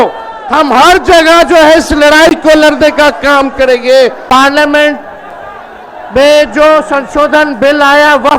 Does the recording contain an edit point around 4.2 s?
yes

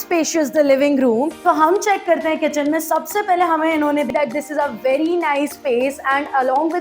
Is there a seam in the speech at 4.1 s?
yes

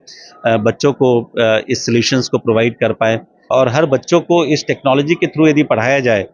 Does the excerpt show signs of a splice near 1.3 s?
no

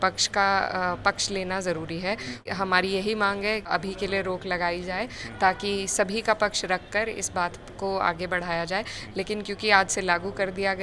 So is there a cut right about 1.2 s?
no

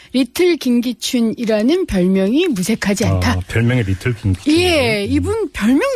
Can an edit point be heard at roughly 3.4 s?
no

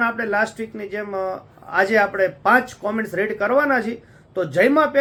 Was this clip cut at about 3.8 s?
no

